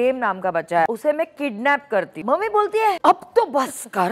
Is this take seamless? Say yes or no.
no